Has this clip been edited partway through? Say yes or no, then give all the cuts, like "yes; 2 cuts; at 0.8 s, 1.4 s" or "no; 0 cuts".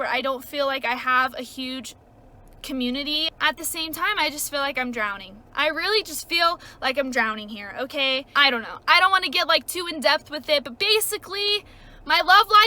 yes; 2 cuts; at 3.2 s, 8.3 s